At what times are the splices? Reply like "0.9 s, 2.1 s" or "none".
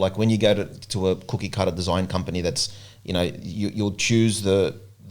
none

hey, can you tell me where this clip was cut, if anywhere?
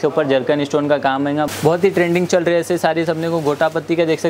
1.5 s

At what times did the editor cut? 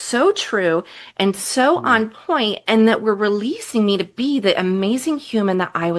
none

